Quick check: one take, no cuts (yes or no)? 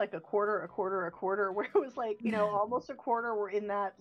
no